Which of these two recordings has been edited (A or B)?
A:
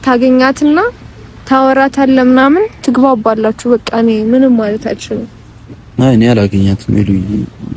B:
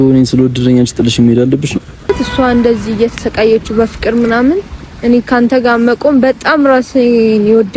B